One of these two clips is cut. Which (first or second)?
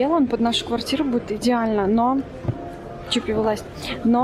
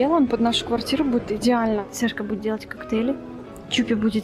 second